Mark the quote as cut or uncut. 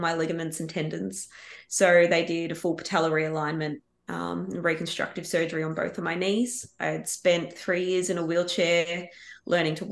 uncut